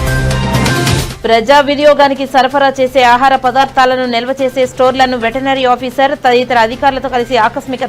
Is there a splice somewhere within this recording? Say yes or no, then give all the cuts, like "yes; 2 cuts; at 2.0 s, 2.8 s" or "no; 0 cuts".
yes; 1 cut; at 1.1 s